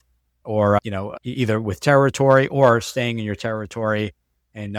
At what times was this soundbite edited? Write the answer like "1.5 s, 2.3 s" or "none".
none